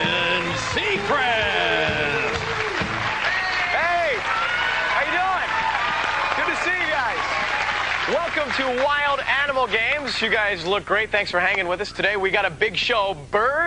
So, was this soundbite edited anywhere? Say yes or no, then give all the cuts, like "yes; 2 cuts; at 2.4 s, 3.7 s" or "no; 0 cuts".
no; 0 cuts